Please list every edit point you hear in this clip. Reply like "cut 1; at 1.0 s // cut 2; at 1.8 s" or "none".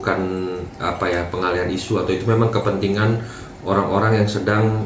none